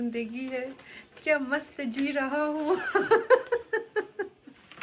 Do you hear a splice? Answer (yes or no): no